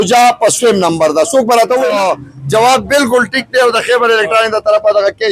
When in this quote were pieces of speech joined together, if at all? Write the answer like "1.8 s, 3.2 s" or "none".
1.9 s